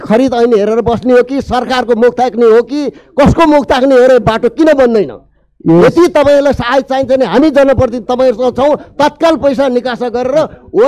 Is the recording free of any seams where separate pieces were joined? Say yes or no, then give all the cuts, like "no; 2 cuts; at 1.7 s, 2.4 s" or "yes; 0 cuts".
yes; 0 cuts